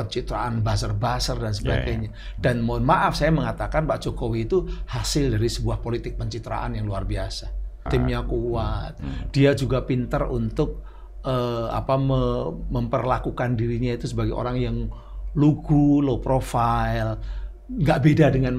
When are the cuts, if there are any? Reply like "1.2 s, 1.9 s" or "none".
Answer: 7.9 s